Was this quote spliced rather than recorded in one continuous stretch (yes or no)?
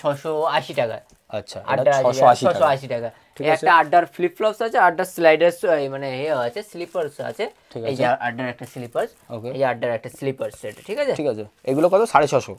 no